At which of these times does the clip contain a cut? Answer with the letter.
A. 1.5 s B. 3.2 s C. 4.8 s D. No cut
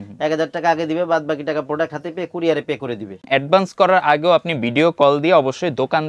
B